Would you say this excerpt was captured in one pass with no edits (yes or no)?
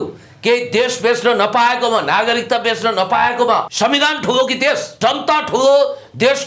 no